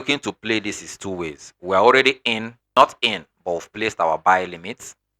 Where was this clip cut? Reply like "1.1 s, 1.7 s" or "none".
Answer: 2.6 s